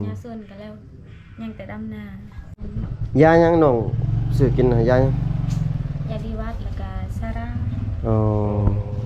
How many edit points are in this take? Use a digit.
1